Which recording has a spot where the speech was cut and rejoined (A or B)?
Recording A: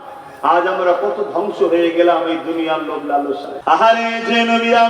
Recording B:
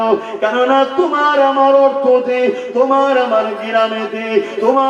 A